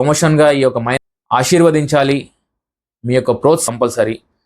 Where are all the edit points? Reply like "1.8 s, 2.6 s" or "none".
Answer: 1.0 s, 3.6 s